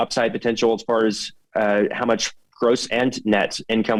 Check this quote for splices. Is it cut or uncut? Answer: uncut